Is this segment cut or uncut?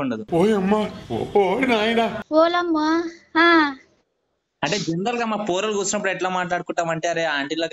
cut